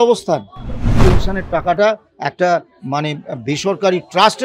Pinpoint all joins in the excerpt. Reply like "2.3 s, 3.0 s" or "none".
1.0 s